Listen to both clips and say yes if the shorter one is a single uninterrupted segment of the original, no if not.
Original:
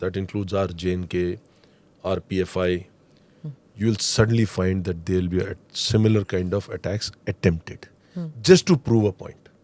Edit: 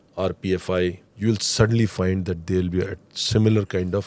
no